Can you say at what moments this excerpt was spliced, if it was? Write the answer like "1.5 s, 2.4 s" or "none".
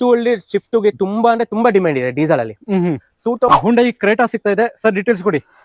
3.5 s